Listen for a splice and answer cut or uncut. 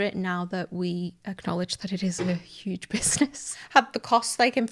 cut